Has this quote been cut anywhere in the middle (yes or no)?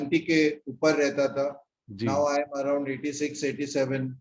no